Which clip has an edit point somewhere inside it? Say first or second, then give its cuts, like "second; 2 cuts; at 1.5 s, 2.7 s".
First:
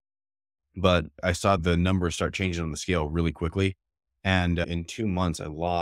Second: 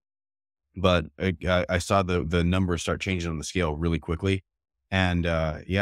first; 2 cuts; at 1.5 s, 4.6 s